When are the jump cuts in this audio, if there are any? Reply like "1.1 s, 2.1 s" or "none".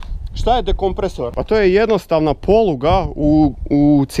1.3 s